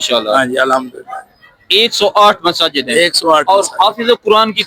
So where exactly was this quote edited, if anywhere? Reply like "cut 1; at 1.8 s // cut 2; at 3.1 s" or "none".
none